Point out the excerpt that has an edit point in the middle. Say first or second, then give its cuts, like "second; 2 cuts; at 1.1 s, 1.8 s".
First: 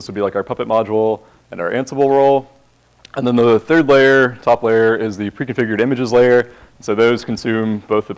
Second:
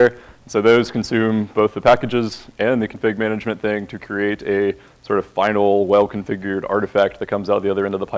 second; 1 cut; at 6.7 s